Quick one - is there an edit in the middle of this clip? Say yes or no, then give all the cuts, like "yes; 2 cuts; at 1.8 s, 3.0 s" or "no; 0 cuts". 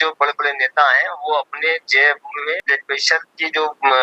yes; 1 cut; at 2.6 s